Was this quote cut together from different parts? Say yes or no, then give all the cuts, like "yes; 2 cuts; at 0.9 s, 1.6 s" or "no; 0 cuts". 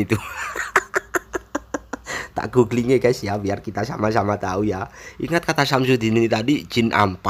no; 0 cuts